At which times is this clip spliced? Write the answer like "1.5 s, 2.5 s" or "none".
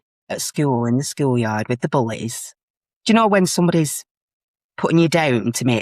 none